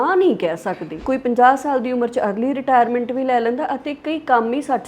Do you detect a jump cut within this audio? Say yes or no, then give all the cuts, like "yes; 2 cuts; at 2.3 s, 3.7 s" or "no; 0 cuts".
yes; 1 cut; at 1.0 s